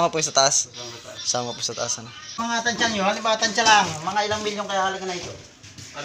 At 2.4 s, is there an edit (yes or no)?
yes